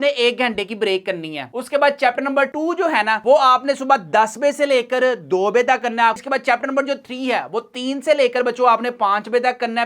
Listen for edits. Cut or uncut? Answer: cut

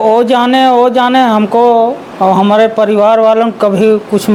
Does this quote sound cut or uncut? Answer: uncut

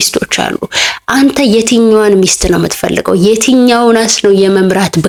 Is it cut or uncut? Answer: uncut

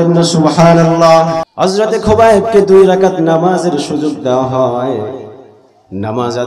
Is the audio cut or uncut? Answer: cut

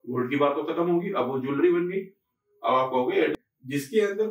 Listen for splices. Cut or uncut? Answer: cut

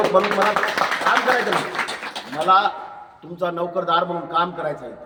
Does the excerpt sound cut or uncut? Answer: uncut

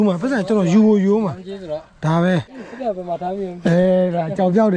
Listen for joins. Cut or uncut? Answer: uncut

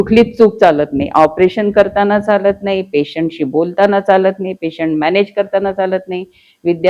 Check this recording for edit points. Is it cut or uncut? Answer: uncut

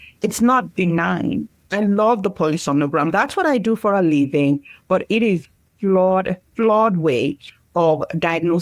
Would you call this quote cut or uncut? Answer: cut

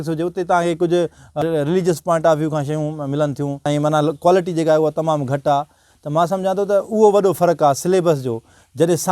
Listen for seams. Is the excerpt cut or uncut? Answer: cut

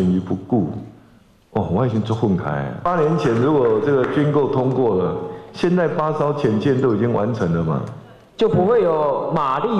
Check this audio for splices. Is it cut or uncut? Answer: cut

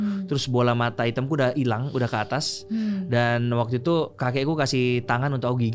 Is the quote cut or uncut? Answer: uncut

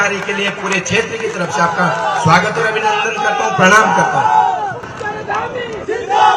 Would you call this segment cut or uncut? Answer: uncut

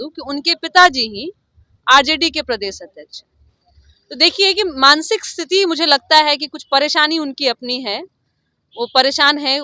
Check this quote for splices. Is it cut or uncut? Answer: uncut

